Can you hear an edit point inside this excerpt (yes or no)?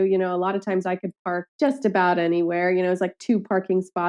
yes